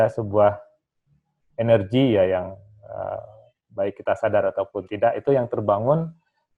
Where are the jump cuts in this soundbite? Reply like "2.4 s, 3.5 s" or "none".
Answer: none